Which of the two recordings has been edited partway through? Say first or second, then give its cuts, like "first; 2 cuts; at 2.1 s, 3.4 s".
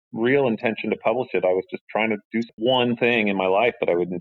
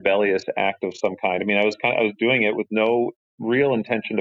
first; 1 cut; at 2.5 s